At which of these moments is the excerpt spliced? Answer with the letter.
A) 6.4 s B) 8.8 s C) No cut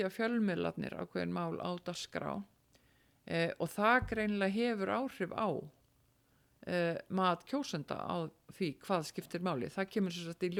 C